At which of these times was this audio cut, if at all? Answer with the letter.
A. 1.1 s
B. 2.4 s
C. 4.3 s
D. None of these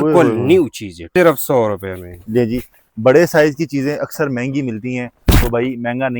A